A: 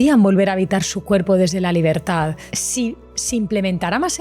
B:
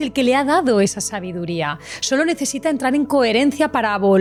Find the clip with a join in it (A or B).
A